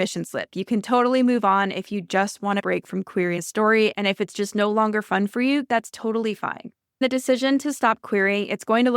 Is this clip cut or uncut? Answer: cut